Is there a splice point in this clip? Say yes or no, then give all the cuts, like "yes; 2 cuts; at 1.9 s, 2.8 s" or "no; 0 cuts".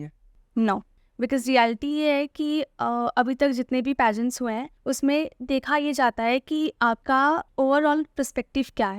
yes; 3 cuts; at 1.0 s, 4.7 s, 7.2 s